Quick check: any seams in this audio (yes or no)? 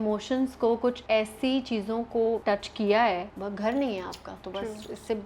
yes